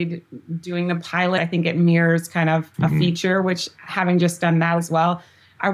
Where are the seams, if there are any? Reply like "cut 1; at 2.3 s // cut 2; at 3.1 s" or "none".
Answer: cut 1; at 1.4 s // cut 2; at 2.7 s